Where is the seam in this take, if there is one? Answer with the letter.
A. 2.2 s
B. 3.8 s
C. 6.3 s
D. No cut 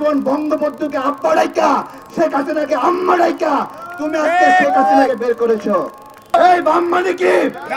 C